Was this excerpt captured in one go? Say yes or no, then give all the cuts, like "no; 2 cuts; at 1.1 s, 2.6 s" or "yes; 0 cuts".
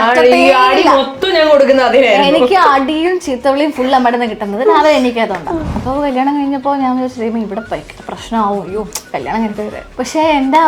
no; 1 cut; at 5.7 s